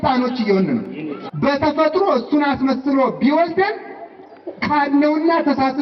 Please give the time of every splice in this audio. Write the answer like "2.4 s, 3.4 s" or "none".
1.2 s